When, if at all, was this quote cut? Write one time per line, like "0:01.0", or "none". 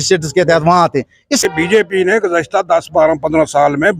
0:01.4